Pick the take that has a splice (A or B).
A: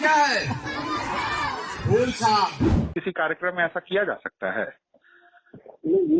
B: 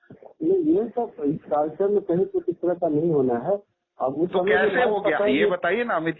A